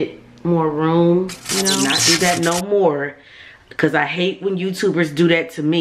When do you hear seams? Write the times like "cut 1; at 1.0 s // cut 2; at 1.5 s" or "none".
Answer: cut 1; at 1.9 s